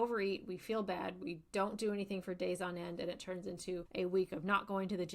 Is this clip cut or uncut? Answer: cut